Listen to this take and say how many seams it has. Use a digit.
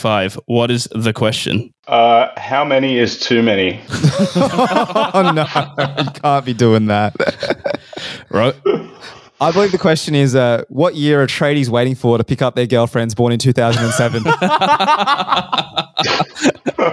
0